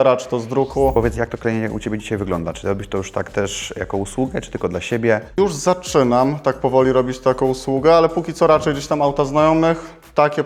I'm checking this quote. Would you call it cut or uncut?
cut